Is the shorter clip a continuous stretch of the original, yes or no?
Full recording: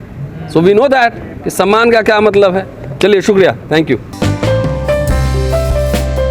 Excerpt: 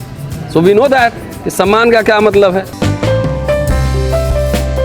no